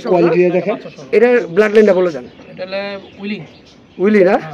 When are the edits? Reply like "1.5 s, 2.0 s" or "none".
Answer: 1.2 s